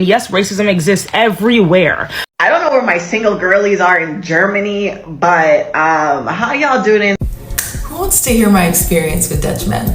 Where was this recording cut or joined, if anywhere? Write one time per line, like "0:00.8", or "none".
0:02.1
0:07.2